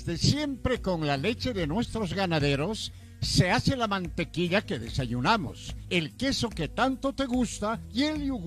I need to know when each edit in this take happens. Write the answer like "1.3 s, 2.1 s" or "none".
none